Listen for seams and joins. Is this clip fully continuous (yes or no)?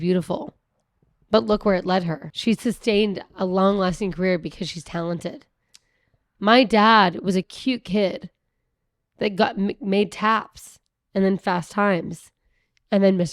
no